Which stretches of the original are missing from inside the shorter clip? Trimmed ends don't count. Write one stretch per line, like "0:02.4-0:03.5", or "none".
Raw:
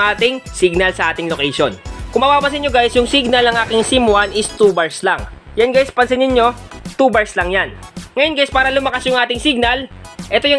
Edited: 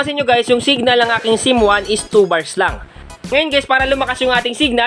0:05.4-0:07.8